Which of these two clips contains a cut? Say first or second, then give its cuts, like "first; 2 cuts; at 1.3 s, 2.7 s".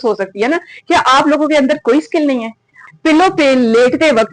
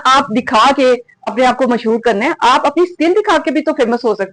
first; 1 cut; at 2.8 s